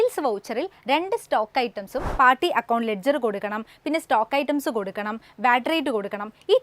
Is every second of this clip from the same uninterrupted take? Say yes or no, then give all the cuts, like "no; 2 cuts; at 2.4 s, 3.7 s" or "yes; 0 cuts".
no; 1 cut; at 2.0 s